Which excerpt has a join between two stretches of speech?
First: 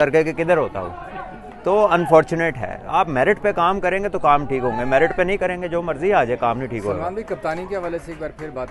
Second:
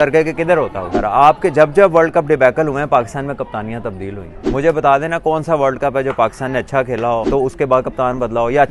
second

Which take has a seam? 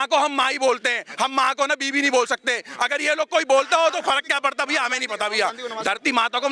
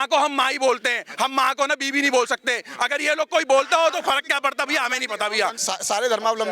second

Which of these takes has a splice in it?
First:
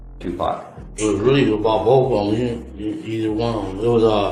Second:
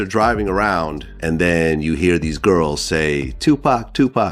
second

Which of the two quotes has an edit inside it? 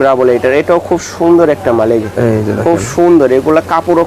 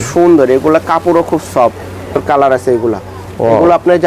second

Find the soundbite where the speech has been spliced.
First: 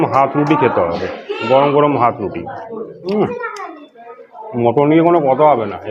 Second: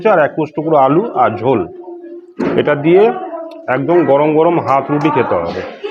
first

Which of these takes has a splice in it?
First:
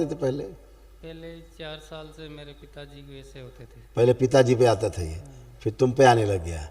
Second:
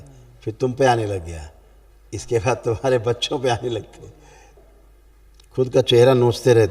second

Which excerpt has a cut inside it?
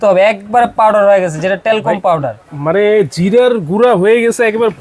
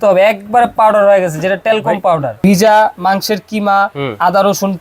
second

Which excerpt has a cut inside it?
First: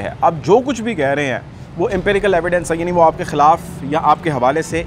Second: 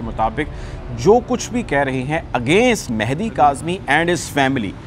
second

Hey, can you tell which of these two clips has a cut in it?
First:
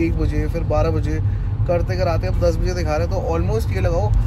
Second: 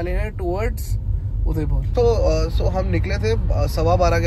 second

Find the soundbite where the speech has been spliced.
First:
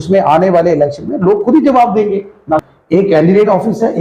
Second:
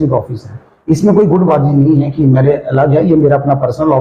first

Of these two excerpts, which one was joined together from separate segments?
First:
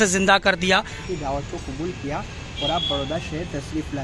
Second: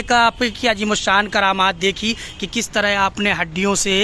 first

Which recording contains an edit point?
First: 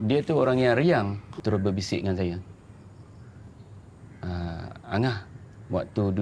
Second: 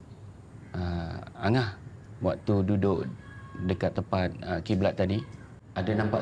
first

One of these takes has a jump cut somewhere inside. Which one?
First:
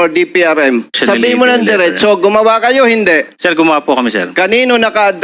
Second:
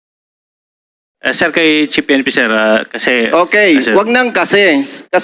first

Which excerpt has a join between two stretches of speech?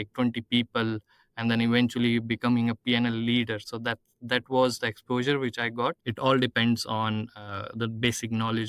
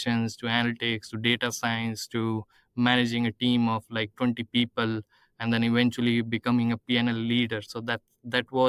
first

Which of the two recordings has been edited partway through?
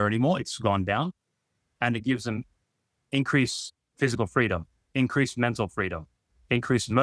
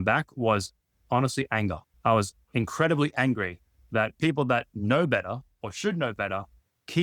second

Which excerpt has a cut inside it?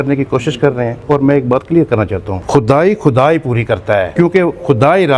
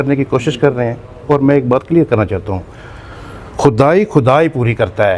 first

